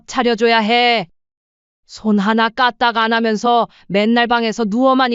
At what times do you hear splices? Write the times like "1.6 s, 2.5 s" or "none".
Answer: 1.1 s